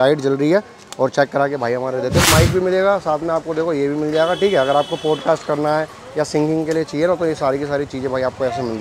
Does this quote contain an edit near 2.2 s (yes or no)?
yes